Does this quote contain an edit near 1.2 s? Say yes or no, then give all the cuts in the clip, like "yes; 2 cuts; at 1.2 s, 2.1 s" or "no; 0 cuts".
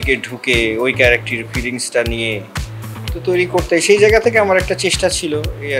no; 0 cuts